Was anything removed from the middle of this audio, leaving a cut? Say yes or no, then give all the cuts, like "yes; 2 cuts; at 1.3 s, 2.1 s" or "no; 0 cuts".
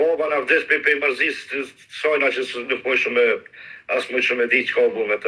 no; 0 cuts